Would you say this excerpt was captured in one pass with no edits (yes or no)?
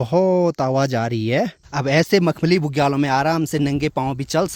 no